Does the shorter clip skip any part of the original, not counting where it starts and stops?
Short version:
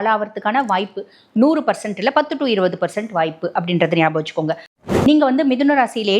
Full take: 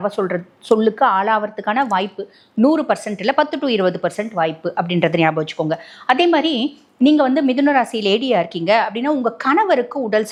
yes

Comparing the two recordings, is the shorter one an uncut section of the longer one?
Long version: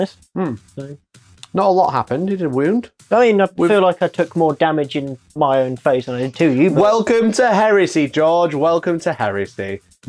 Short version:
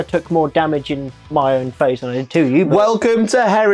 yes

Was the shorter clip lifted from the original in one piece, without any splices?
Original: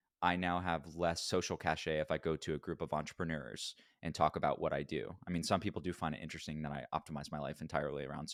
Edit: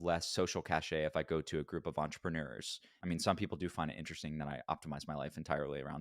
no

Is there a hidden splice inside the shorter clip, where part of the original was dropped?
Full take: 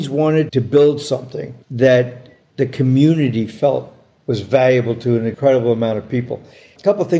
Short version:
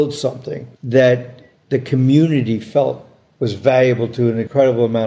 no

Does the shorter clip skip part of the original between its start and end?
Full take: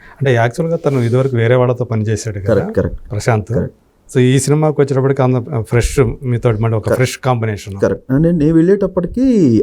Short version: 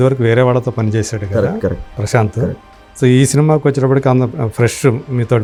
no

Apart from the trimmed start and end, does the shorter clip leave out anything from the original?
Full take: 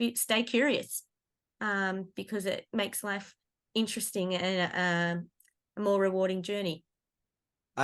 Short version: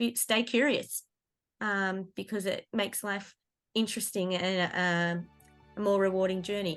no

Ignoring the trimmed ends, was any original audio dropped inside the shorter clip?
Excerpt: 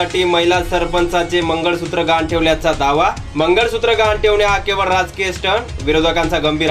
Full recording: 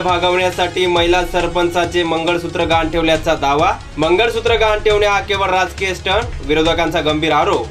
no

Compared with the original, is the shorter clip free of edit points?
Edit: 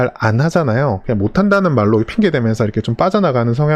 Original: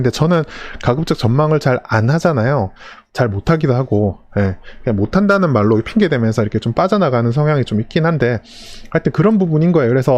no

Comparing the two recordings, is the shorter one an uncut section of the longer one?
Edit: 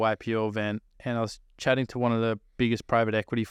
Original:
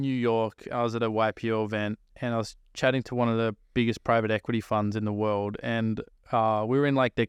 yes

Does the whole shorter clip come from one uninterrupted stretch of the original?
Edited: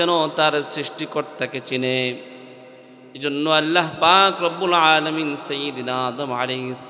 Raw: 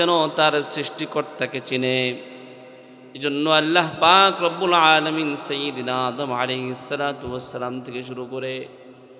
yes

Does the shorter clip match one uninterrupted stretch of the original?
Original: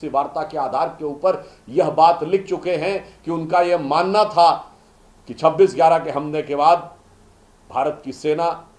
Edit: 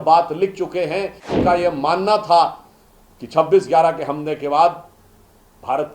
no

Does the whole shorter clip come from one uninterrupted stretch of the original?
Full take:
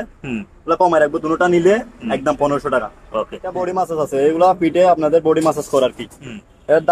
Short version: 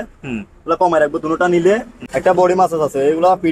no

